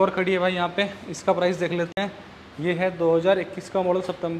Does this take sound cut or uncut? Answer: uncut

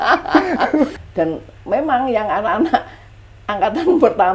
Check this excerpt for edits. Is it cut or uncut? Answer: cut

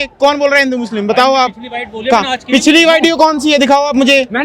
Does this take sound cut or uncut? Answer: uncut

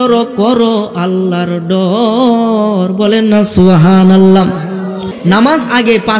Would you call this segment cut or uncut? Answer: cut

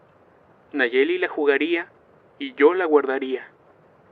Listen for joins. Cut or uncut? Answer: cut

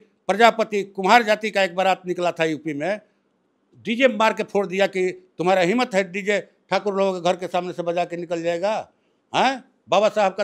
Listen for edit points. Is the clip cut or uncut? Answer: uncut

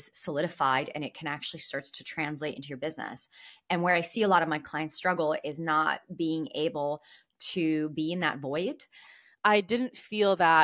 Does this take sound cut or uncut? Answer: cut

